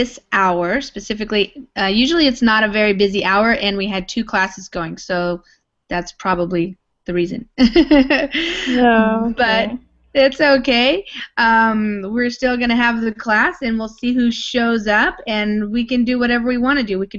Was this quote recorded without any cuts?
yes; 0 cuts

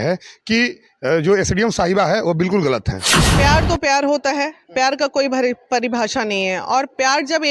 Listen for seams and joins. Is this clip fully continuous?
no; 1 cut; at 3.3 s

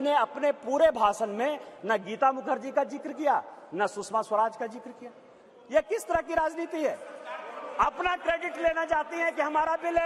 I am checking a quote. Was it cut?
no; 0 cuts

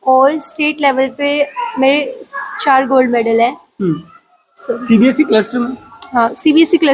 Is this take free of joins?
yes; 0 cuts

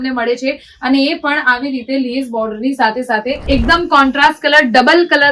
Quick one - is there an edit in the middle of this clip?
yes; 1 cut; at 3.4 s

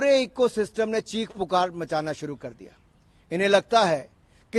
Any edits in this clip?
no; 0 cuts

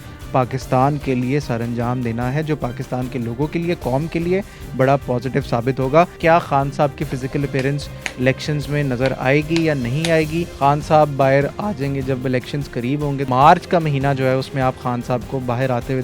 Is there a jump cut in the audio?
yes; 3 cuts; at 6.1 s, 10.5 s, 13.3 s

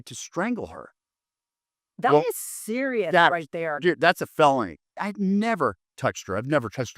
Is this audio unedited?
no; 1 cut; at 4.9 s

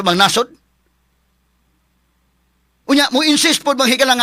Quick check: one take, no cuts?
yes; 0 cuts

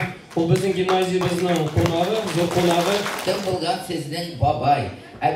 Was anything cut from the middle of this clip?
yes; 1 cut; at 3.1 s

